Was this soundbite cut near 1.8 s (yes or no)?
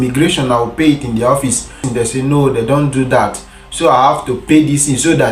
yes